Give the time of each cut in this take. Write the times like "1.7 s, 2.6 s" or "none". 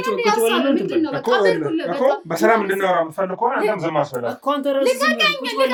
none